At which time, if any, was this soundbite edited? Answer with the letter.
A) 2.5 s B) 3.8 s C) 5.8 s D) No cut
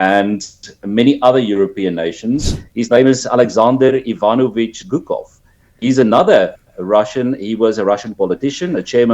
A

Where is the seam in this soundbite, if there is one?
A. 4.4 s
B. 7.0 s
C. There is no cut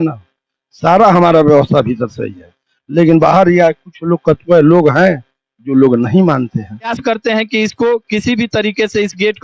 B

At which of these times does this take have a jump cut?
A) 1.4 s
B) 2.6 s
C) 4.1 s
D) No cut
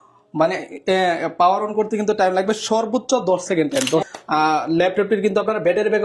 C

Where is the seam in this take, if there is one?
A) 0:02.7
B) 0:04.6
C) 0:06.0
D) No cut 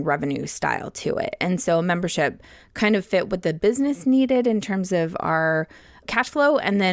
C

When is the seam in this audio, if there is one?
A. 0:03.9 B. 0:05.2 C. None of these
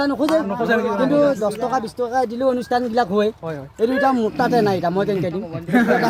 C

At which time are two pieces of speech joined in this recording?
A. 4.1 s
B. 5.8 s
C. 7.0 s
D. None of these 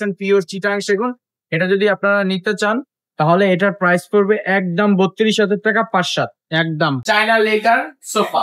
C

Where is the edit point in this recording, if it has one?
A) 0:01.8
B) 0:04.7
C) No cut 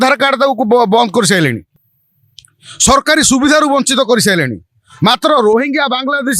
C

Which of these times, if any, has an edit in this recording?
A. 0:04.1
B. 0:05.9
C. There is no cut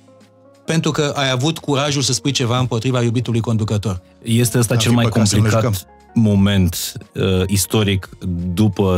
A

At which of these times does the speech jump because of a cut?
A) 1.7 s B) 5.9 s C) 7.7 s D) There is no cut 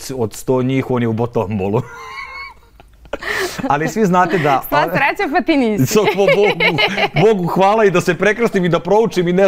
D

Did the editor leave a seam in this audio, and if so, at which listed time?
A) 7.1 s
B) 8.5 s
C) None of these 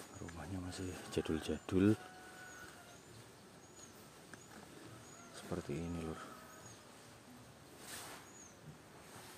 A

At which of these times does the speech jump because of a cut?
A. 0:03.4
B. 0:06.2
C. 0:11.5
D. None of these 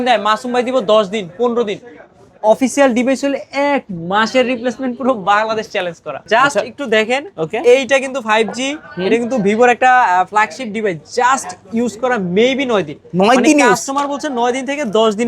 B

